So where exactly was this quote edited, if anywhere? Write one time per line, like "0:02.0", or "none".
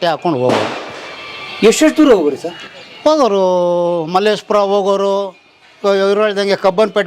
none